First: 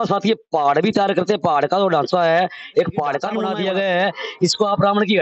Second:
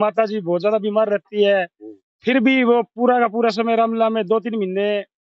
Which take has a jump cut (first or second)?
first